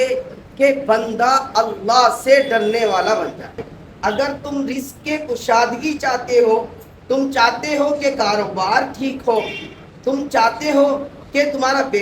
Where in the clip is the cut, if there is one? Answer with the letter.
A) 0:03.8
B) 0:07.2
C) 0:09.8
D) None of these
A